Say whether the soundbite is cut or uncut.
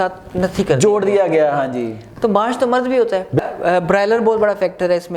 cut